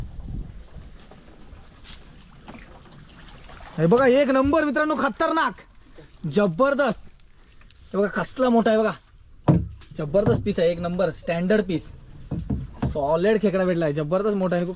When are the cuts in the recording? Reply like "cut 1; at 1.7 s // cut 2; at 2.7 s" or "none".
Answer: none